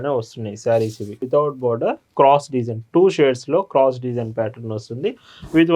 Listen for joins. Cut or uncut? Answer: cut